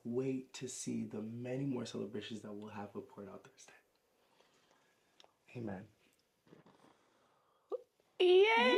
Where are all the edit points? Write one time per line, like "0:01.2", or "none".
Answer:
none